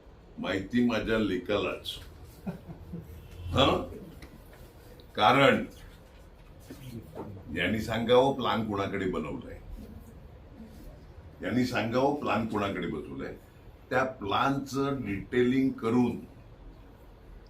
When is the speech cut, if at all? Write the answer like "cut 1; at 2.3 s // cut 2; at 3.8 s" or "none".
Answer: none